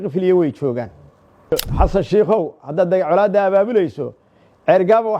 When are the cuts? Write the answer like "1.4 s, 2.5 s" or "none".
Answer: 1.5 s